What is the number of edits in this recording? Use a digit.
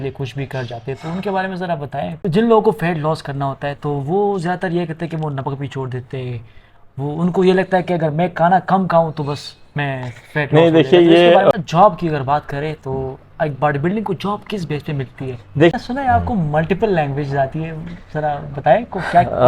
3